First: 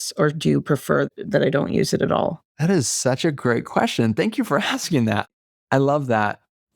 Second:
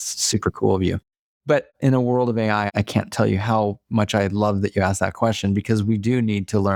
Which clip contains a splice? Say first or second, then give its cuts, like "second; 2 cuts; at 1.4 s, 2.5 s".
first; 1 cut; at 2.5 s